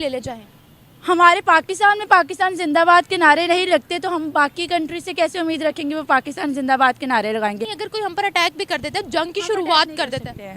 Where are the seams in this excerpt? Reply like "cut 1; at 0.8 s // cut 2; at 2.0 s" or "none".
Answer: cut 1; at 7.6 s